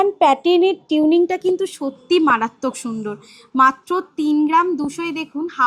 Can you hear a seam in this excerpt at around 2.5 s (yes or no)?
no